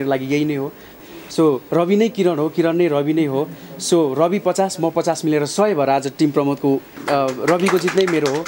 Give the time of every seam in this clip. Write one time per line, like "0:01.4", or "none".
0:01.0
0:07.0